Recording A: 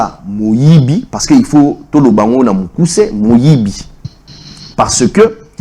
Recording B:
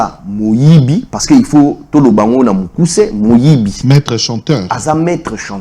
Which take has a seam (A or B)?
B